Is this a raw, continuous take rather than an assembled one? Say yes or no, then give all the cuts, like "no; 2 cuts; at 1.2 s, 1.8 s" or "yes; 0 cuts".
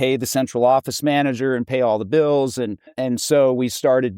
no; 1 cut; at 2.9 s